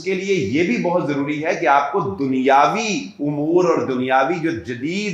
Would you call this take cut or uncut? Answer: uncut